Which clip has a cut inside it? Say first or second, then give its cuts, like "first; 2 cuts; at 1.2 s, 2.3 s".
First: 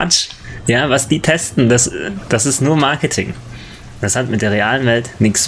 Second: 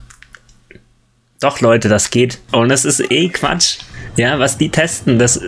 second; 1 cut; at 2.4 s